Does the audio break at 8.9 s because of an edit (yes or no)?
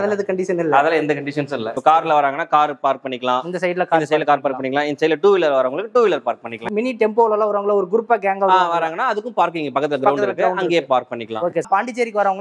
no